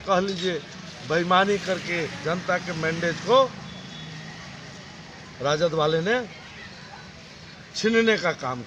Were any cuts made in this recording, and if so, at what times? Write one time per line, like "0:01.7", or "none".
none

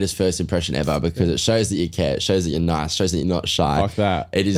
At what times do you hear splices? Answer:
none

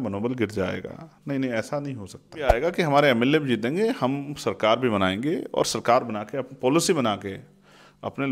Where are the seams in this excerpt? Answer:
0:02.5

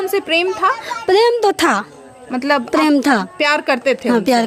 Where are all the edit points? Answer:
none

